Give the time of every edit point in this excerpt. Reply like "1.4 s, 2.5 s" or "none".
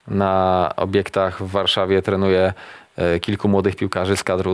none